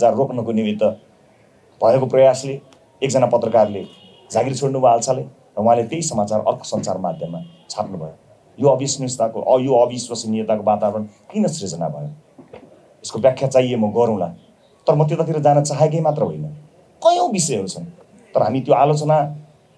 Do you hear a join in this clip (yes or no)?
no